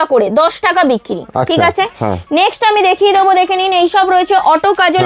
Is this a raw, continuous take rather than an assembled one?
yes; 0 cuts

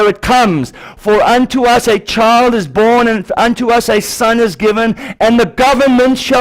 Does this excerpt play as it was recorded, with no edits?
yes; 0 cuts

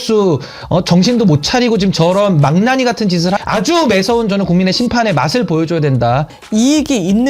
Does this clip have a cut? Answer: yes; 2 cuts; at 3.4 s, 6.3 s

